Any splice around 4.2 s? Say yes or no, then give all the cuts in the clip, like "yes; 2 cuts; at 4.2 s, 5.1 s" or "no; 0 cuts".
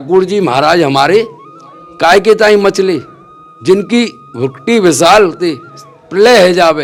no; 0 cuts